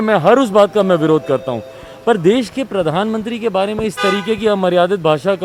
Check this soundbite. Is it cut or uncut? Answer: uncut